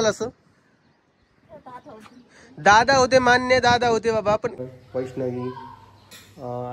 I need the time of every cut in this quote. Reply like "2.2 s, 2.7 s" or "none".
4.6 s